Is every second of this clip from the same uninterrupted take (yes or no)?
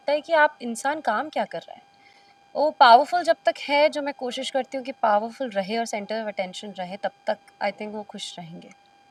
yes